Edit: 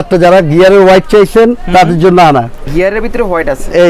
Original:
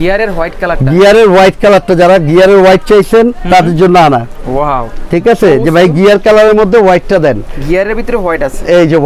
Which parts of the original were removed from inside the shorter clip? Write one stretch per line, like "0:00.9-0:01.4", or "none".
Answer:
0:04.4-0:07.5